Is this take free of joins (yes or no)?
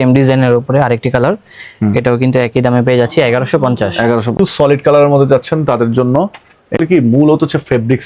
no